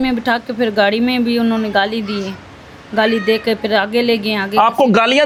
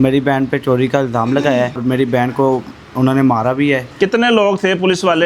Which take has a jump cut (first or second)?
second